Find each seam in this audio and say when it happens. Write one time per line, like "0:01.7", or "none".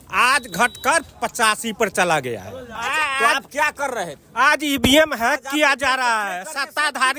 0:02.7